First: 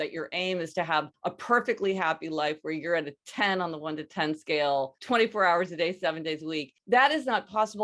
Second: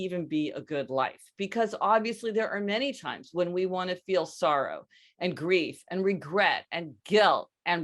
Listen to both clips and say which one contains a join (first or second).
first